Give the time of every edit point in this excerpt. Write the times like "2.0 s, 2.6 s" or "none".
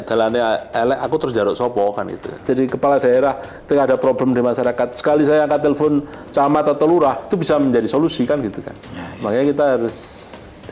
2.4 s